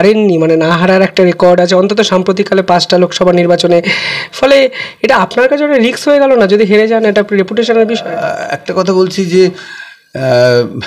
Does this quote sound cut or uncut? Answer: uncut